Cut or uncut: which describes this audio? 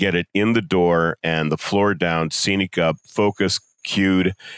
cut